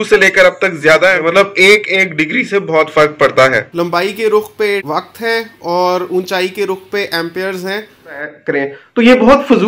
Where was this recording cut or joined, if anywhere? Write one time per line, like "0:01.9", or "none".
0:01.2
0:03.7
0:08.5